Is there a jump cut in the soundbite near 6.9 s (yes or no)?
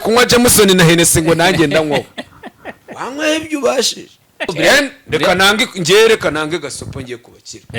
no